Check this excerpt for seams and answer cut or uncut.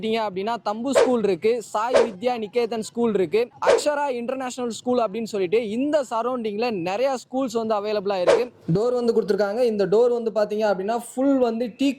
cut